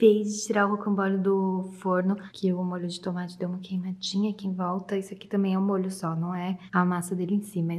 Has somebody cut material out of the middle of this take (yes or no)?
yes